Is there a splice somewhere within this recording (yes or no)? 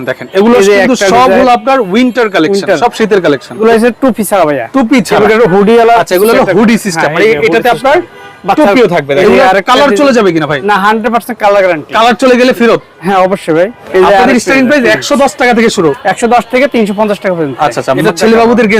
yes